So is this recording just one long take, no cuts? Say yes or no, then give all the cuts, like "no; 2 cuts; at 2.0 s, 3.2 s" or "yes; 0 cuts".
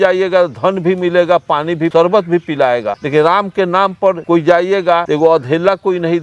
no; 4 cuts; at 1.9 s, 3.0 s, 4.2 s, 5.0 s